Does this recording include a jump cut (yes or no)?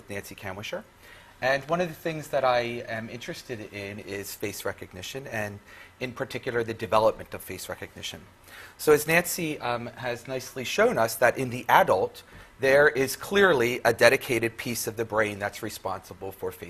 yes